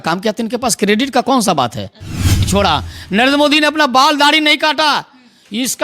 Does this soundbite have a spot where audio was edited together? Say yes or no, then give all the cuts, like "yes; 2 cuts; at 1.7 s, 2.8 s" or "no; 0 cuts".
yes; 1 cut; at 2.5 s